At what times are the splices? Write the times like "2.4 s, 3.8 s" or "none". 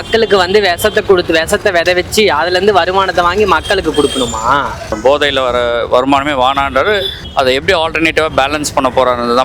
5.0 s, 7.2 s